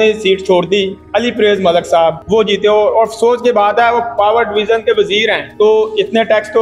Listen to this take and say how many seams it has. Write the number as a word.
three